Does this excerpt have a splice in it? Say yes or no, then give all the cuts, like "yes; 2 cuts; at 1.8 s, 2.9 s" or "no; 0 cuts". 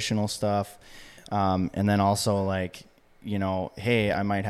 no; 0 cuts